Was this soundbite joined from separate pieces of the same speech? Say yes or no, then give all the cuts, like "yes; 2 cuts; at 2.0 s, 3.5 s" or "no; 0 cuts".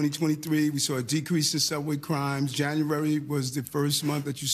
no; 0 cuts